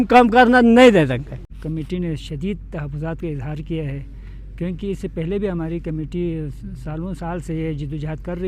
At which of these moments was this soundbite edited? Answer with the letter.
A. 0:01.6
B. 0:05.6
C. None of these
A